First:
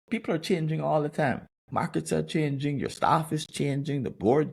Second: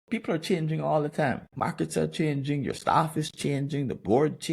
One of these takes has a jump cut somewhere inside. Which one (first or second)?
second